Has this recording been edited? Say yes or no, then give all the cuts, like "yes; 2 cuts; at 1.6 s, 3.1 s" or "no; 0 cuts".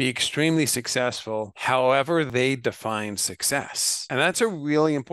yes; 3 cuts; at 1.5 s, 2.3 s, 4.3 s